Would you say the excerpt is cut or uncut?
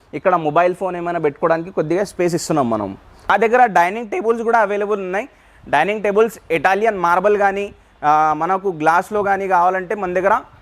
cut